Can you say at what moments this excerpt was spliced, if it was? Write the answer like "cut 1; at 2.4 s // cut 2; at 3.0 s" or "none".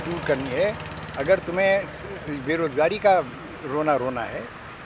none